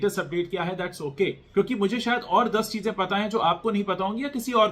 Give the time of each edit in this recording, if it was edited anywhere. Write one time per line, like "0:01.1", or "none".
0:01.4

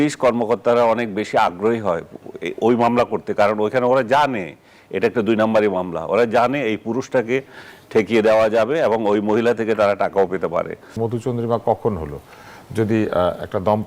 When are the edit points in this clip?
0:11.0

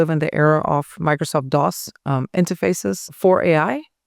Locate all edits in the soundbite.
0:03.1

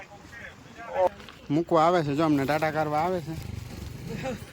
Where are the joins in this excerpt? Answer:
0:01.1

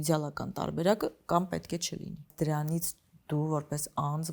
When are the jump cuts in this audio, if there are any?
0:02.3

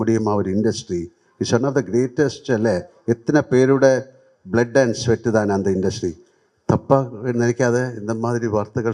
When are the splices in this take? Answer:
none

